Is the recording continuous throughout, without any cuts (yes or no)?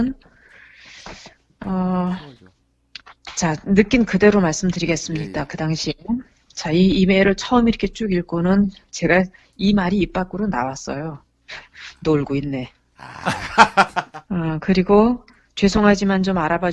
no